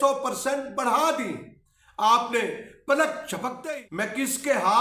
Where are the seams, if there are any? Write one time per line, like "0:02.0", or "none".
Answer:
0:03.6